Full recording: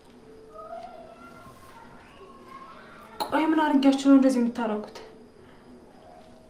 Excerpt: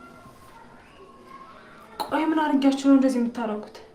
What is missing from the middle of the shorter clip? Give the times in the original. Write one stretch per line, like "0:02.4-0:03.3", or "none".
none